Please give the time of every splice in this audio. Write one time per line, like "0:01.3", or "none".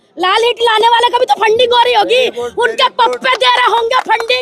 none